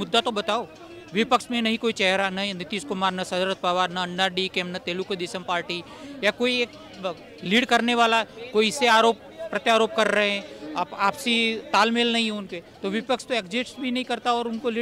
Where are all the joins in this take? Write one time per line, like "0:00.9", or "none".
none